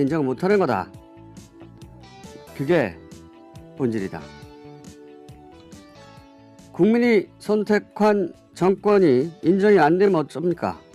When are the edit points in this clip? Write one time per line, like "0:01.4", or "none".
0:09.4